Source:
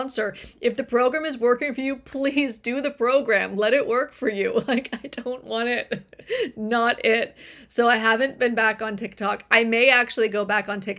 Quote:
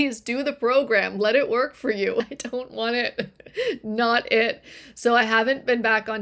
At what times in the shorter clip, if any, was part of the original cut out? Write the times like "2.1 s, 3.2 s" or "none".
2.2 s